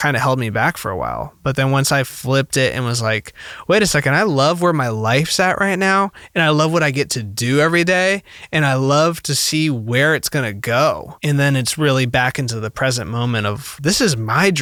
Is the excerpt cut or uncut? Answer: uncut